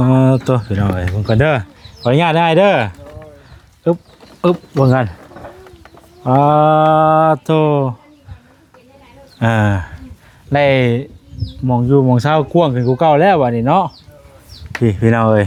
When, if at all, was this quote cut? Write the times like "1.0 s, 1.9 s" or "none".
none